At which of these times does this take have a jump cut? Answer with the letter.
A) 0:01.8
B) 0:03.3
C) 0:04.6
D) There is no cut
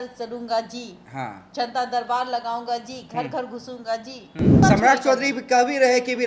C